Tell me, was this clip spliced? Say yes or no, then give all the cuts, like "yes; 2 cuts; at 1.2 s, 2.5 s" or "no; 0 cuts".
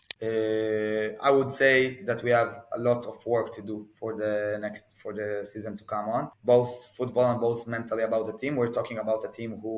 yes; 1 cut; at 6.3 s